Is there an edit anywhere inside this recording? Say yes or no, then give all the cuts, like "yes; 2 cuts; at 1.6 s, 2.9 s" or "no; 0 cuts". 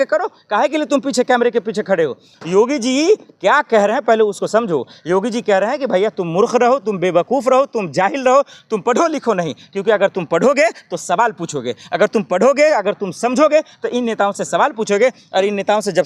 no; 0 cuts